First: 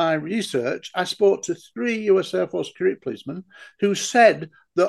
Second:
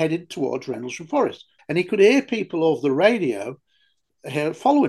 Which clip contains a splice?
second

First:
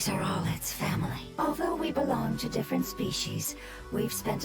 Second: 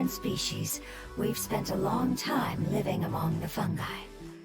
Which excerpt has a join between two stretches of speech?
first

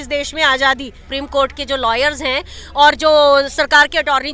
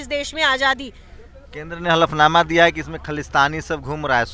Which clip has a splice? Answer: first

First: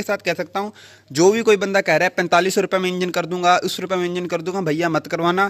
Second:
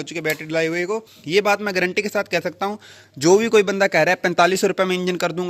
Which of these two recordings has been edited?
second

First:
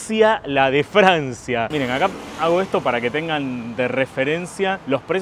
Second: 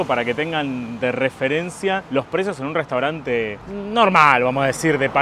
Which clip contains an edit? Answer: first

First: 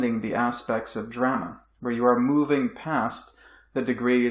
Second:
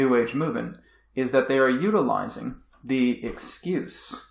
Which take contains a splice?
second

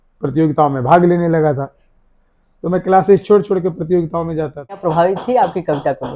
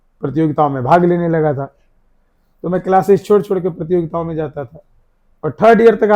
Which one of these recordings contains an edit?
first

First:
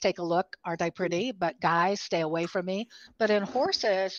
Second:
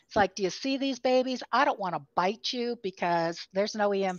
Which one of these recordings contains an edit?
first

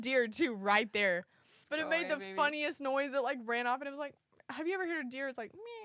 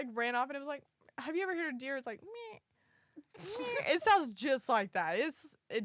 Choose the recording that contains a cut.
first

